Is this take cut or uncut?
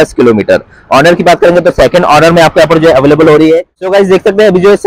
cut